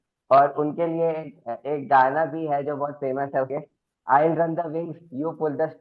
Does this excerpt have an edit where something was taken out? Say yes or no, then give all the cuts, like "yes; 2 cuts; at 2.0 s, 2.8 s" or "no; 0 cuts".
yes; 1 cut; at 3.5 s